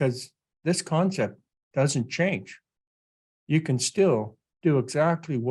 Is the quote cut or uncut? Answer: uncut